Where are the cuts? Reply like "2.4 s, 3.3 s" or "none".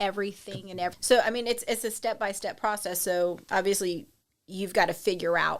0.9 s

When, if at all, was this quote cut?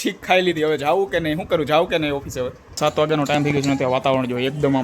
2.8 s

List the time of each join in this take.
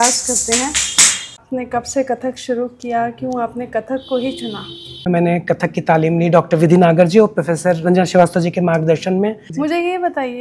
1.4 s, 5.1 s, 9.5 s

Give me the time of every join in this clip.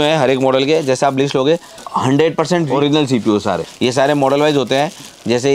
1.8 s, 2.7 s, 3.7 s

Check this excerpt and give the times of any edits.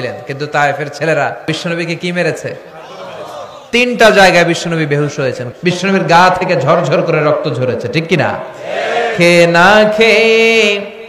1.5 s, 5.4 s

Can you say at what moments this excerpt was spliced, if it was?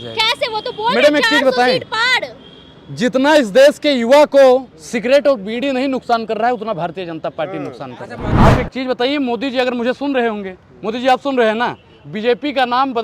8.3 s

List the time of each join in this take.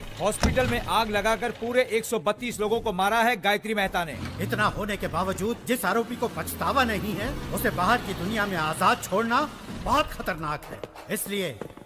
4.1 s

